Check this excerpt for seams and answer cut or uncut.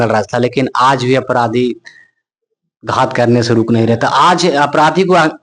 uncut